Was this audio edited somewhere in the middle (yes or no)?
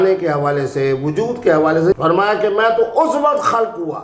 yes